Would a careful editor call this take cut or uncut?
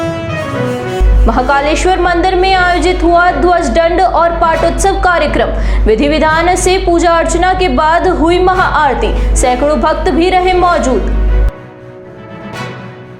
cut